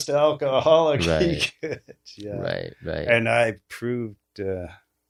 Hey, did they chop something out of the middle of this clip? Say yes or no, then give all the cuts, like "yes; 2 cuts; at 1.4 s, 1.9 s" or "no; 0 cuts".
no; 0 cuts